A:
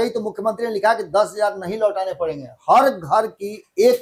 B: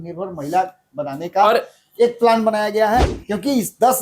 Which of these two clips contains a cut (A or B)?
B